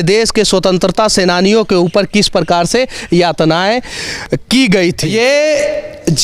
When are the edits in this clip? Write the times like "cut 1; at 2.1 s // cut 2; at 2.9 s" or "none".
cut 1; at 5.0 s